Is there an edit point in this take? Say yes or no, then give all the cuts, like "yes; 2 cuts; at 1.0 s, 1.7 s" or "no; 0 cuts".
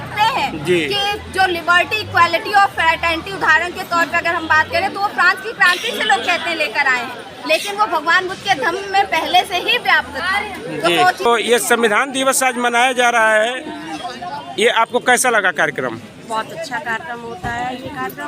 yes; 1 cut; at 11.3 s